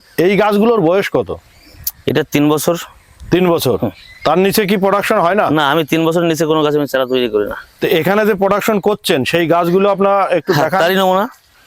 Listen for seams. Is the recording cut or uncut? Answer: uncut